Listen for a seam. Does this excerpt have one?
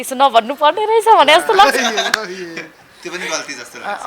no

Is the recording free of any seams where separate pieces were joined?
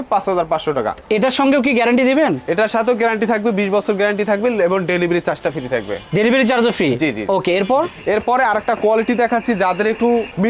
yes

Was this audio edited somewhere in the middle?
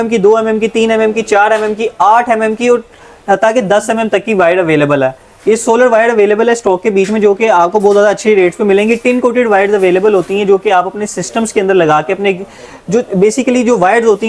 no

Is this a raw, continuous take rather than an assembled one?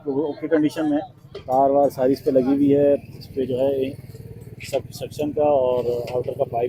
yes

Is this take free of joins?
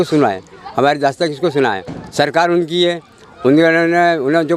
yes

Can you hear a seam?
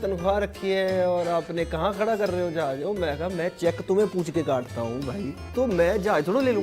yes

